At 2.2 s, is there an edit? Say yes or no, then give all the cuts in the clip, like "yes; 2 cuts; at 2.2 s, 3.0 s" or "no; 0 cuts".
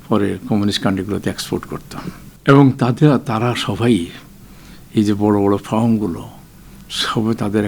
yes; 1 cut; at 2.2 s